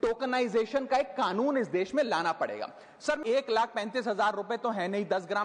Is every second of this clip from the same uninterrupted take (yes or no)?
no